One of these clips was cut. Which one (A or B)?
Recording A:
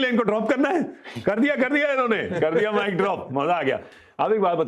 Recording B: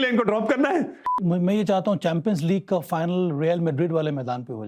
B